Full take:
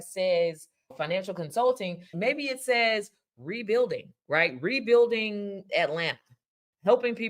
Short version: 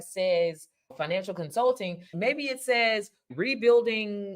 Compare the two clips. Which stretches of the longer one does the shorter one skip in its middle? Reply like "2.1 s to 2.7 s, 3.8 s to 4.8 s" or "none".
3.3 s to 4.6 s